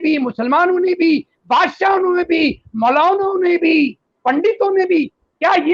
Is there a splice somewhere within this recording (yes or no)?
no